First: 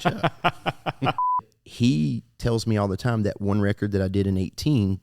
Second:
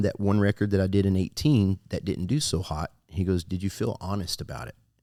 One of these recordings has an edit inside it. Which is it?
first; 1 cut; at 1.5 s

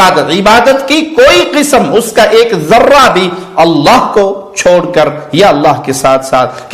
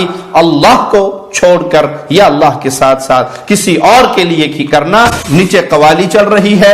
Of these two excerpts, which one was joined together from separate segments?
second; 1 cut; at 5.2 s

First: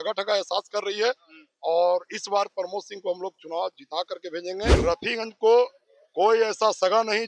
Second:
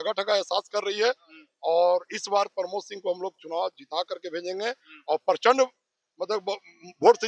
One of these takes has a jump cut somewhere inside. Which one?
first; 1 cut; at 4.8 s

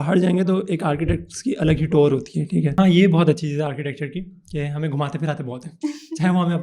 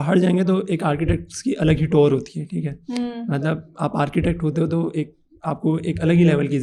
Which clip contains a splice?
first; 1 cut; at 2.8 s

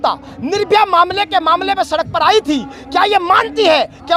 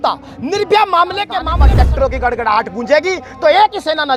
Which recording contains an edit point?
second; 1 cut; at 1.6 s

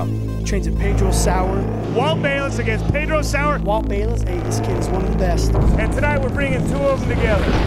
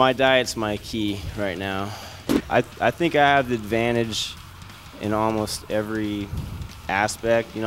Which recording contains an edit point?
second; 1 cut; at 2.3 s

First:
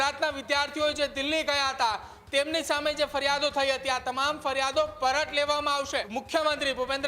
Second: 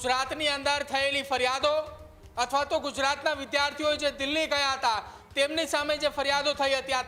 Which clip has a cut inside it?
first; 1 cut; at 6.1 s

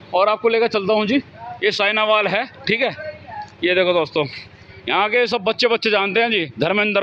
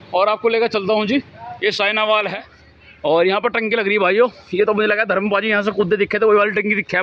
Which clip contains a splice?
second; 1 cut; at 2.5 s

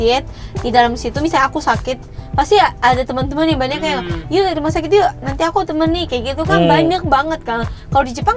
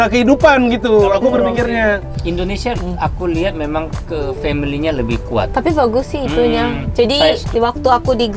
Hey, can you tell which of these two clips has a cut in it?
second; 2 cuts; at 2.1 s, 7.5 s

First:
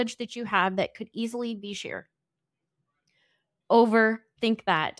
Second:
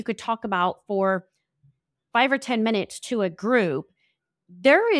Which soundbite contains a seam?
first; 1 cut; at 3.5 s

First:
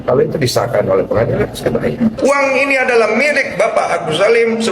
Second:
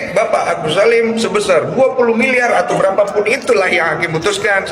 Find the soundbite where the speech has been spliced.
first; 1 cut; at 2.2 s

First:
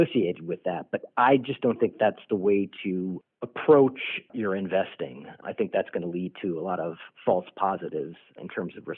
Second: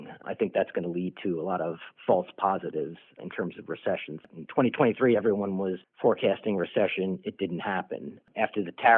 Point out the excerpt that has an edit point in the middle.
second; 1 cut; at 5.8 s

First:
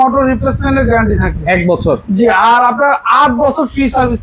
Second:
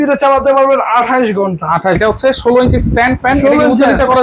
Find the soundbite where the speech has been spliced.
second; 1 cut; at 2.0 s

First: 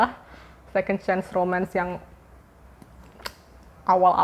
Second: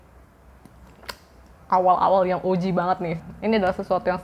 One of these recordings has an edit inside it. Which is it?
second; 1 cut; at 3.2 s

